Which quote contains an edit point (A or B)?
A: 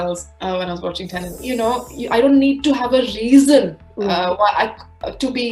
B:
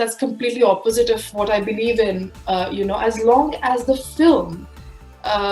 A